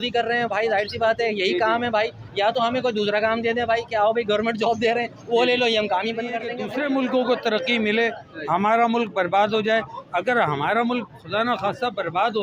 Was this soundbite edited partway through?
yes; 1 cut; at 6.6 s

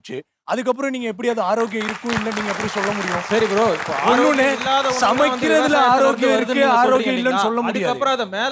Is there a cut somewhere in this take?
no; 0 cuts

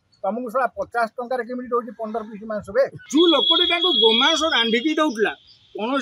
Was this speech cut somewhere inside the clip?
yes; 1 cut; at 3.0 s

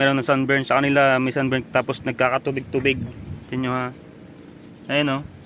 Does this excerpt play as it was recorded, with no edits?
yes; 0 cuts

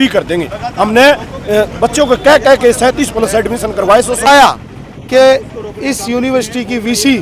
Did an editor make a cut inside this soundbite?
yes; 1 cut; at 4.3 s

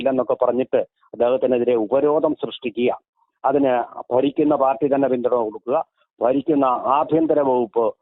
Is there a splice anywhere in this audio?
no; 0 cuts

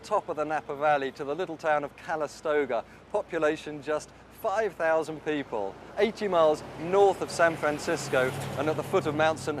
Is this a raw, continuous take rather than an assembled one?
no; 1 cut; at 8.3 s

